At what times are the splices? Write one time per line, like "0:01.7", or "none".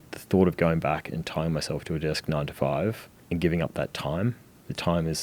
0:03.1